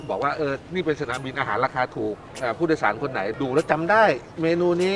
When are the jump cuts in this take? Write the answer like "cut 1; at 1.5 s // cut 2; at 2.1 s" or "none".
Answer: cut 1; at 2.3 s // cut 2; at 3.3 s